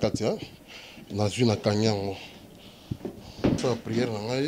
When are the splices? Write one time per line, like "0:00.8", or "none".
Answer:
0:03.6